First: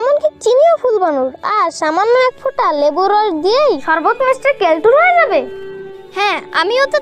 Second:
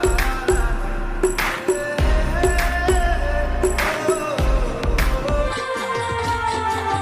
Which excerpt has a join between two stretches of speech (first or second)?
second